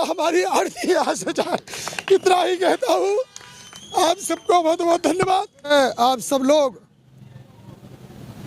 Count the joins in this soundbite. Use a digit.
1